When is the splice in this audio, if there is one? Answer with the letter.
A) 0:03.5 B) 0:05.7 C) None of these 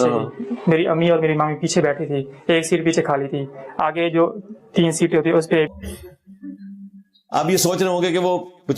B